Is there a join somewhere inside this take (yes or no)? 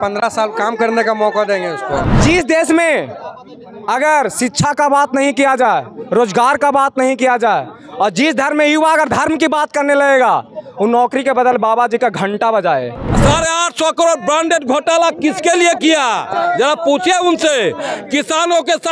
yes